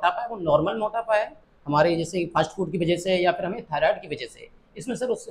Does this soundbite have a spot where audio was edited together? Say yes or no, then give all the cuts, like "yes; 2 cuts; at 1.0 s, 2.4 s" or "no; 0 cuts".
no; 0 cuts